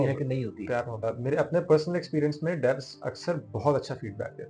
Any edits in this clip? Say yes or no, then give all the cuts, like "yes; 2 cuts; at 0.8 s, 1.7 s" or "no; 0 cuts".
yes; 1 cut; at 1.0 s